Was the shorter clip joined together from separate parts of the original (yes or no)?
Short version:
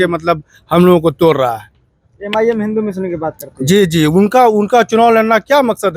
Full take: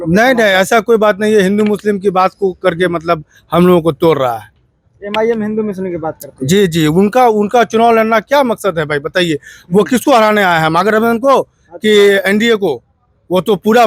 no